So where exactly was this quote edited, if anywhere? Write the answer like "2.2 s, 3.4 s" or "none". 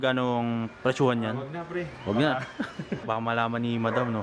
3.0 s